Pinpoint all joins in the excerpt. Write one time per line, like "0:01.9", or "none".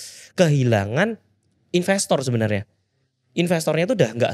none